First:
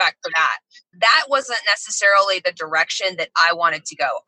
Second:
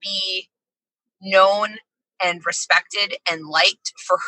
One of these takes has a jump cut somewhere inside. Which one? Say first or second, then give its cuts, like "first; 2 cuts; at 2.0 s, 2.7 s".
first; 1 cut; at 0.9 s